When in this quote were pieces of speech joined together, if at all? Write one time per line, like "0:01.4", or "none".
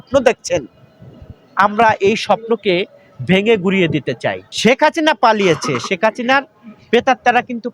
0:04.5